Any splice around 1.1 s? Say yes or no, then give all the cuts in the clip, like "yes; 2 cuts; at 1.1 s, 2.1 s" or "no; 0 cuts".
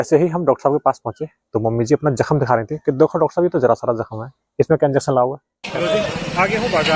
no; 1 cut; at 5.5 s